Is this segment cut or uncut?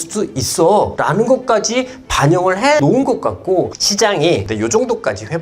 cut